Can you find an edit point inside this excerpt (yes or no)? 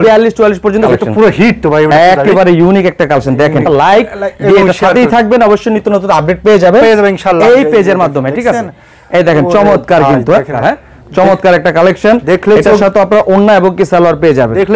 yes